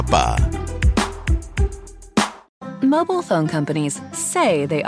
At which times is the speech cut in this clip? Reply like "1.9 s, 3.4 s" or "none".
2.5 s

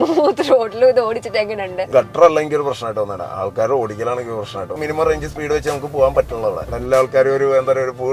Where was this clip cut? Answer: 1.9 s, 4.7 s, 6.7 s

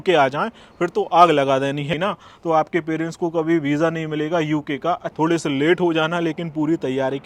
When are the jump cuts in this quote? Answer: 1.9 s, 5.1 s

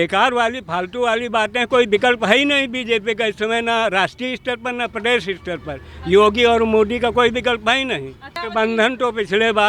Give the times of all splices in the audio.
8.4 s

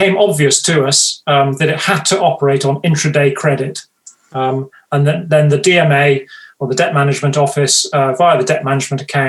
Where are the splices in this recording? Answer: none

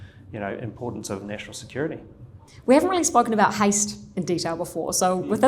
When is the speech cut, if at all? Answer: none

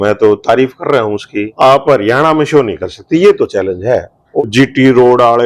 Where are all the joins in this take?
1.4 s, 4.2 s

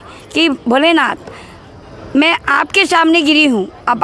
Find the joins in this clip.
none

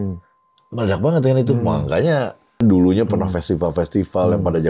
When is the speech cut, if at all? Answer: 2.6 s

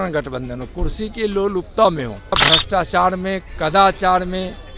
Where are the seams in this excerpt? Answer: 2.4 s

